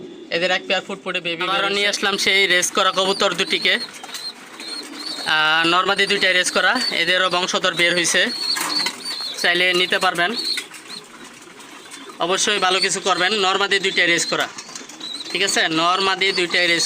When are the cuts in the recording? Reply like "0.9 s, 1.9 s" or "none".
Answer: 1.1 s